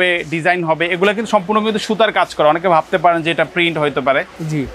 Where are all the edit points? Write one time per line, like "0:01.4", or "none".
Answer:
none